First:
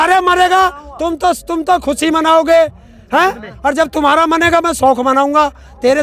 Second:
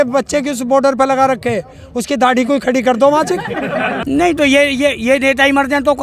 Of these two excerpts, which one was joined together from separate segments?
second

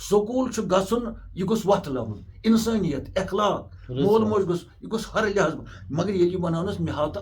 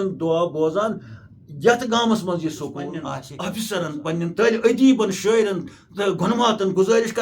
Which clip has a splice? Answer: second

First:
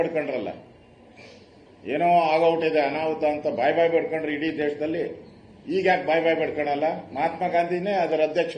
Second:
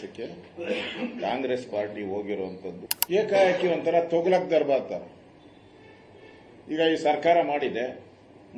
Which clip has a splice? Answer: second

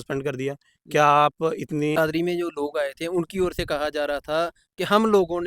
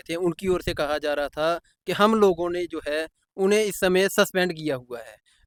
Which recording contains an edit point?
first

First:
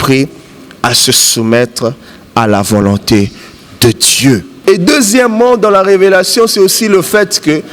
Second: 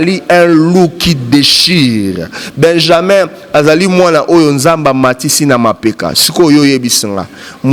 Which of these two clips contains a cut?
first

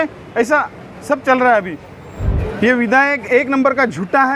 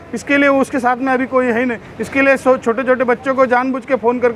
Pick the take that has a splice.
first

